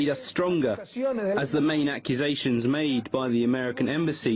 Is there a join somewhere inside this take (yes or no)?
yes